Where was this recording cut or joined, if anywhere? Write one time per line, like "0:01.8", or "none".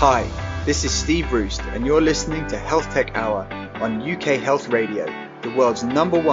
none